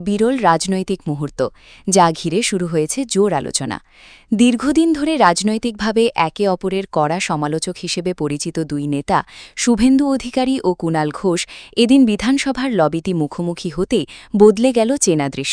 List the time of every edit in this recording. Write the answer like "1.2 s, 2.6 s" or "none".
none